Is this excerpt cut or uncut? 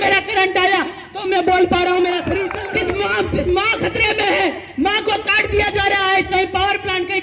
cut